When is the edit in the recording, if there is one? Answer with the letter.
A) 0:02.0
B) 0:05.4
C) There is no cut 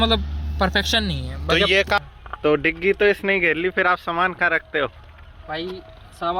A